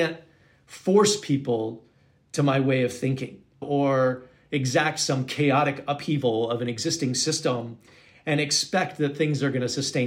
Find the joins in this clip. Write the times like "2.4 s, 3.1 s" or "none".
3.6 s